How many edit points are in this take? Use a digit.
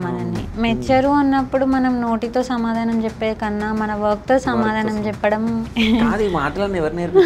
1